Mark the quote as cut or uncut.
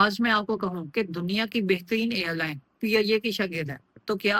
uncut